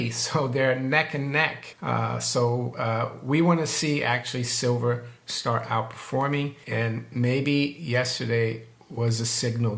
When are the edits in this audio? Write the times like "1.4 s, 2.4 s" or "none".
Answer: 1.7 s, 6.6 s